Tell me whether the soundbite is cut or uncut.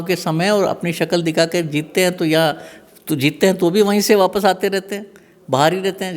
uncut